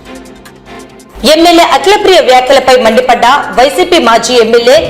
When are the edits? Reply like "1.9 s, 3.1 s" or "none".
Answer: 1.1 s